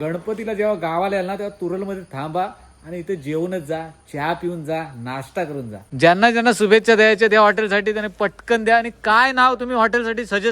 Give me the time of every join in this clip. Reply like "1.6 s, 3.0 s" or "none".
5.8 s

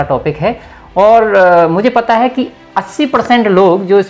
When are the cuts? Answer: none

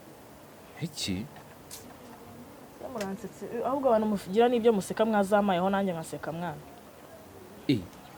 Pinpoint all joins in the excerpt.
none

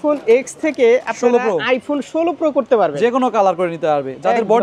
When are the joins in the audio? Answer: none

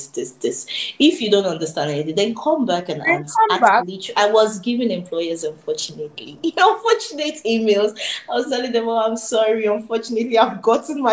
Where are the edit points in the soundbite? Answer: 4.0 s

